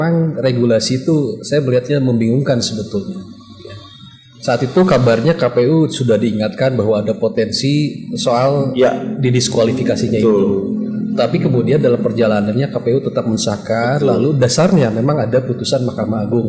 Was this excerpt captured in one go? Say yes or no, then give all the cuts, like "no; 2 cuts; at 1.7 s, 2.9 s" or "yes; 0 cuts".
yes; 0 cuts